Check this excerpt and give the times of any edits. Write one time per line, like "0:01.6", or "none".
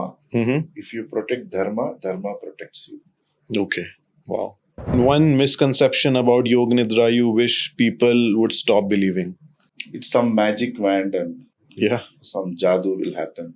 0:04.9